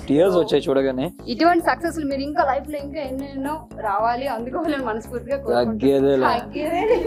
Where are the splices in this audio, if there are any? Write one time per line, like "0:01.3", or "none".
none